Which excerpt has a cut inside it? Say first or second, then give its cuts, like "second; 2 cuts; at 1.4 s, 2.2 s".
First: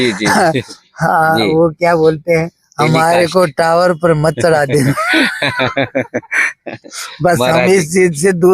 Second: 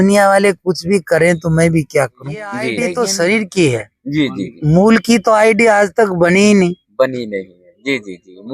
second; 1 cut; at 2.7 s